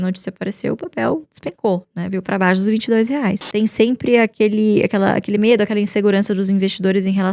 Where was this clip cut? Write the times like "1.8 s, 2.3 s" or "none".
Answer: 3.5 s